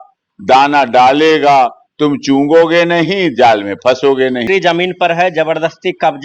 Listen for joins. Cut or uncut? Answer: cut